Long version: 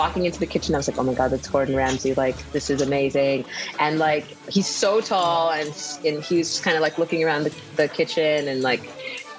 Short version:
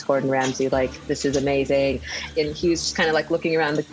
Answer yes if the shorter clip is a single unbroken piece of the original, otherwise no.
no